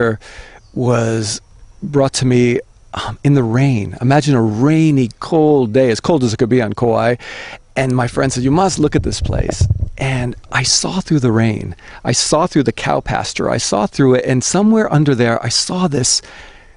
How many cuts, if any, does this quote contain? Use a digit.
1